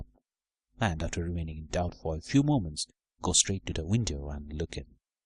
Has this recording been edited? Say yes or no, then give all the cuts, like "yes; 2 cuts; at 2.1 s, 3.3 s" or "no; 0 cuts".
no; 0 cuts